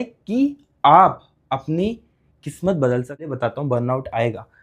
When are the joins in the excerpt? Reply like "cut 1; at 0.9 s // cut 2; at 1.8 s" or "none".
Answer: cut 1; at 3.3 s